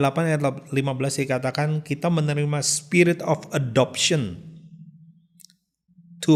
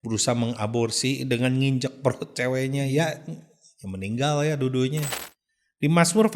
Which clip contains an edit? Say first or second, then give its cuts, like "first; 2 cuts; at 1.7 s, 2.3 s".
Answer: second; 1 cut; at 5.2 s